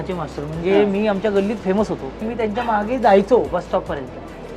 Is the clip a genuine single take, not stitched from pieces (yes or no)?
no